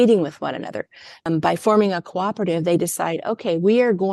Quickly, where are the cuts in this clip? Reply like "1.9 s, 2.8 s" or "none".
1.2 s